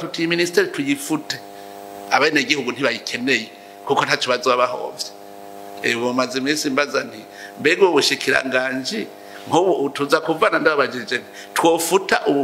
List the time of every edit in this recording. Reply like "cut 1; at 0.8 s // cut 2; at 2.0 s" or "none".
none